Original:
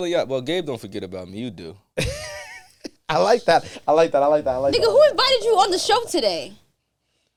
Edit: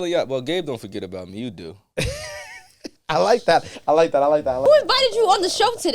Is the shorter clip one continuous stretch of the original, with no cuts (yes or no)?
no